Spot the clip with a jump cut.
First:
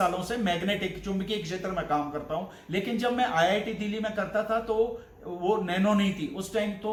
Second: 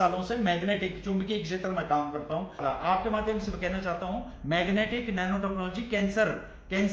second; 1 cut; at 2.6 s

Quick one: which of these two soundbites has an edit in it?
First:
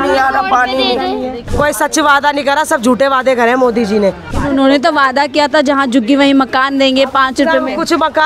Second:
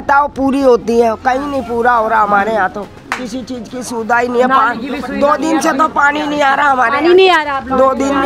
first; 2 cuts; at 1.4 s, 4.3 s

